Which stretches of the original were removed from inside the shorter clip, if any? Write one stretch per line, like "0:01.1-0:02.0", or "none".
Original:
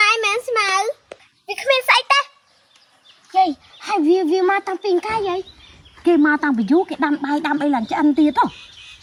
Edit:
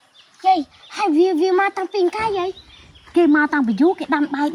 none